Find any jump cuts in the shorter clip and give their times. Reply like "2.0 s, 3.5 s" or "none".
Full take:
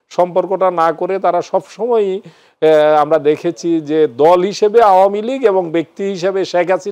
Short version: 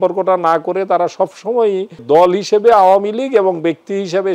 2.0 s